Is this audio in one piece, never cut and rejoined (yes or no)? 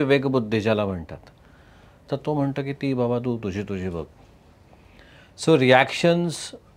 yes